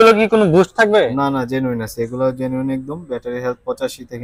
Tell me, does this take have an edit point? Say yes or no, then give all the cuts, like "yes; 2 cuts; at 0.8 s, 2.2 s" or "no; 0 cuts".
no; 0 cuts